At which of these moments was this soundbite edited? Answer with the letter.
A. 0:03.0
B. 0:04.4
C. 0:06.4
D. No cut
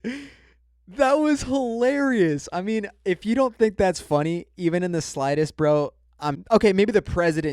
C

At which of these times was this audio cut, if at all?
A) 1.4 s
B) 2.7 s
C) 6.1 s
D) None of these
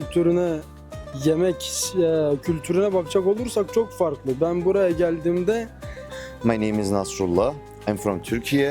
C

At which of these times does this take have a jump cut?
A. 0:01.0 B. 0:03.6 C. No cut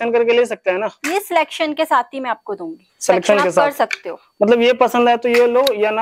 C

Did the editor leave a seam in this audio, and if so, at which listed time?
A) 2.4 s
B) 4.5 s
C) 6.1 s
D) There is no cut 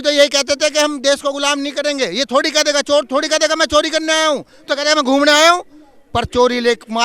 D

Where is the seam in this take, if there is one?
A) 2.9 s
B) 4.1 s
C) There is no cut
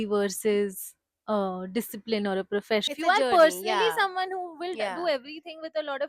A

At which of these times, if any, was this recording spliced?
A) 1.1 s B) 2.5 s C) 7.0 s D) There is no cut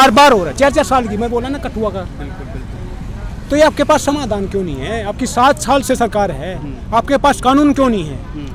D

